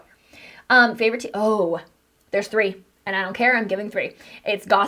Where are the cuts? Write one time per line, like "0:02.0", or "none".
none